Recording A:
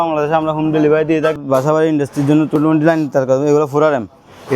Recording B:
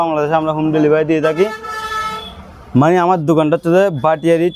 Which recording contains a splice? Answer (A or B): A